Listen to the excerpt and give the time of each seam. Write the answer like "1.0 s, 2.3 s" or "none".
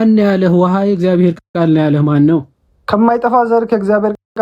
none